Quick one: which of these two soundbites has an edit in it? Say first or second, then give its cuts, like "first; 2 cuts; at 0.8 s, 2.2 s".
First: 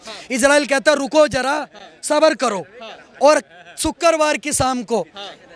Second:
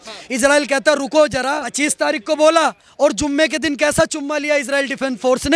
second; 1 cut; at 1.7 s